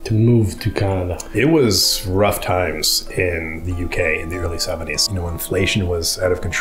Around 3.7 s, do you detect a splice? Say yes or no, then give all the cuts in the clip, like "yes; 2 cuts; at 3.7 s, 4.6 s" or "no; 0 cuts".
no; 2 cuts; at 1.2 s, 5.0 s